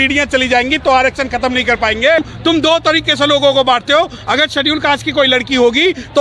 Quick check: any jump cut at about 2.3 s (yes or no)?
yes